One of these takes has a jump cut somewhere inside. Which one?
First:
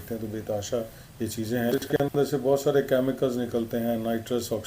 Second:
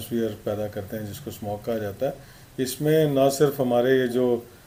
first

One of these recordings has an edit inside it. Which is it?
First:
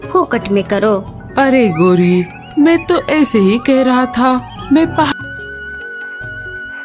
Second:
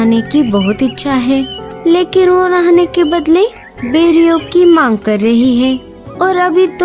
first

